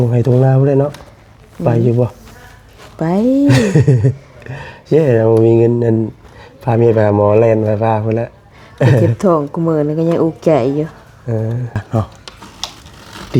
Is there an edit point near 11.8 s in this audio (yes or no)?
yes